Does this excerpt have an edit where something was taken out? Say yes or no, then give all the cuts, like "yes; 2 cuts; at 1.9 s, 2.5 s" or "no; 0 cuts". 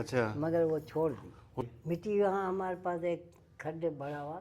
yes; 1 cut; at 1.6 s